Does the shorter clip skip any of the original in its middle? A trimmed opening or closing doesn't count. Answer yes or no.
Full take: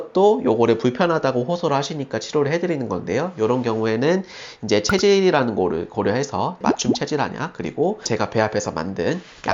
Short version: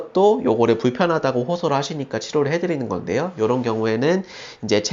no